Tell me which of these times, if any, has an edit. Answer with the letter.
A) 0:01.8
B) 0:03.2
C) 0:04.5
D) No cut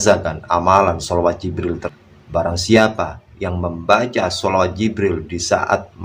A